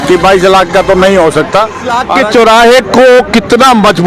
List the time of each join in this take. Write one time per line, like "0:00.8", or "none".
0:02.0